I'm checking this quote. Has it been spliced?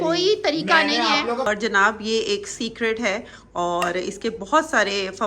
yes; 1 cut; at 1.4 s

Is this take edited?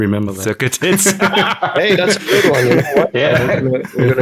no; 0 cuts

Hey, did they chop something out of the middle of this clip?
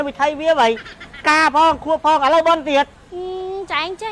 yes; 1 cut; at 3.0 s

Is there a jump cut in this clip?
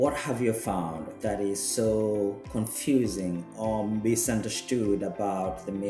yes; 2 cuts; at 1.1 s, 2.4 s

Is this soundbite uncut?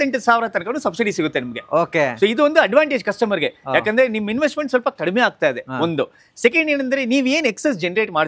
yes; 0 cuts

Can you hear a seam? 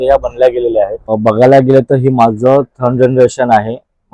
yes; 1 cut; at 1.1 s

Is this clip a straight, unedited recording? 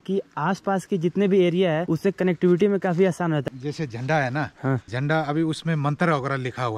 no; 3 cuts; at 1.9 s, 3.4 s, 4.9 s

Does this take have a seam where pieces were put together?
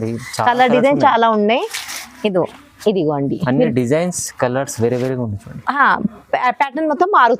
no; 0 cuts

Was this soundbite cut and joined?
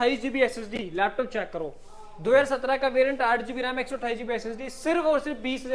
no; 0 cuts

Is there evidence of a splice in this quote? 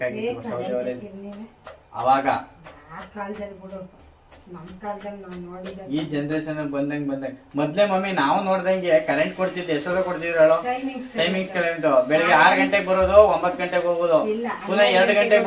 no; 0 cuts

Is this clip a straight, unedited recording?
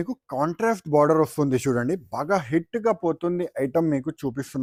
yes; 0 cuts

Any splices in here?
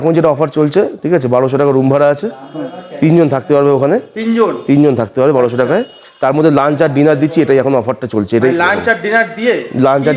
no; 0 cuts

